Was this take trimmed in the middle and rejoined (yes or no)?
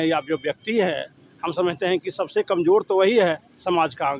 no